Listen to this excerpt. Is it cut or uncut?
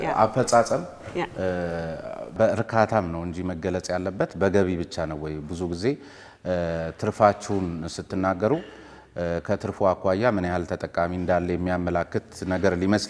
uncut